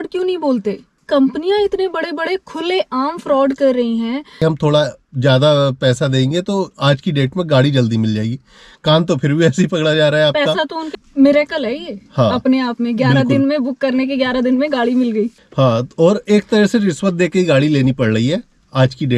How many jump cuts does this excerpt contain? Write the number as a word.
four